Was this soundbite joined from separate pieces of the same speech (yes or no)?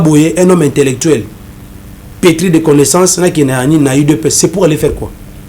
no